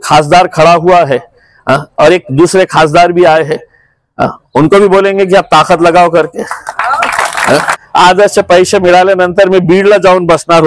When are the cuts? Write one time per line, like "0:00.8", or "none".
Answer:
0:07.8